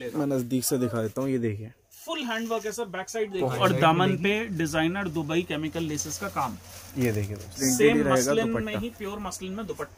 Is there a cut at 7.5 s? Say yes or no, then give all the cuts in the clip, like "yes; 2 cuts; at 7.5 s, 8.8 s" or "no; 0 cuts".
yes; 2 cuts; at 3.5 s, 7.5 s